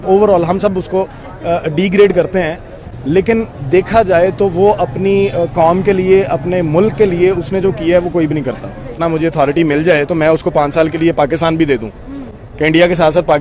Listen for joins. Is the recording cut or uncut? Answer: cut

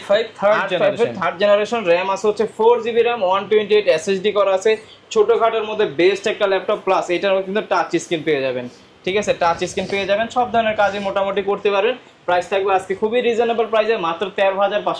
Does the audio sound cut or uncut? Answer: uncut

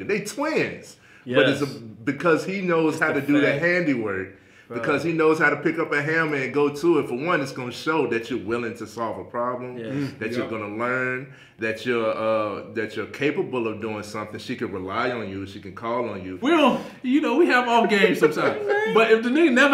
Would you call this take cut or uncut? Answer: cut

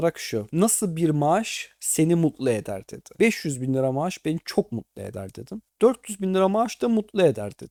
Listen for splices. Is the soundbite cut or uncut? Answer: uncut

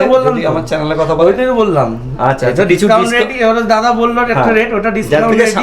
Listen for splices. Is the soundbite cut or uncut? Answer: uncut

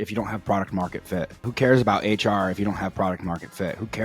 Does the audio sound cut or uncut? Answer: cut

